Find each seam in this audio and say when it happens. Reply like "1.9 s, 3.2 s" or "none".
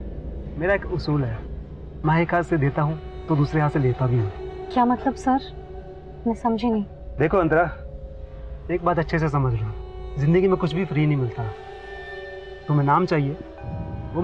none